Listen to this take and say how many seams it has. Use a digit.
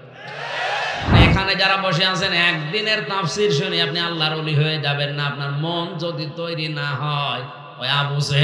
1